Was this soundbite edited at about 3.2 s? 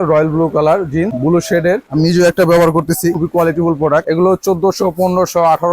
yes; 3 cuts; at 1.5 s, 3.2 s, 4.0 s

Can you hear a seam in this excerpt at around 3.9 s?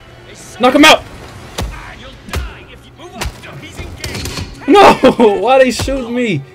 no; 0 cuts

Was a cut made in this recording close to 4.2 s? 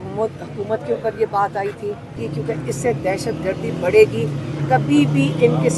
no; 1 cut; at 2.3 s

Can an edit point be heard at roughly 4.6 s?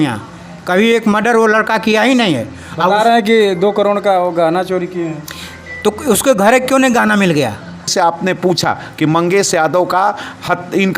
no; 1 cut; at 7.9 s

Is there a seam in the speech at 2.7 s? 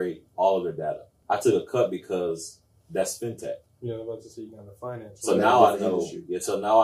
no; 1 cut; at 1.1 s

